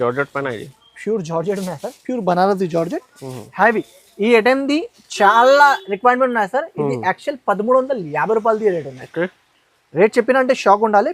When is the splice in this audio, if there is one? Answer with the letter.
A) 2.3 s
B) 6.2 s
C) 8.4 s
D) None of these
D